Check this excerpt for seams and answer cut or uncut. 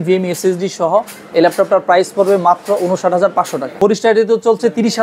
cut